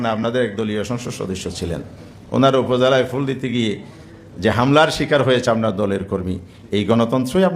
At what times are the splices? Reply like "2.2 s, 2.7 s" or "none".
none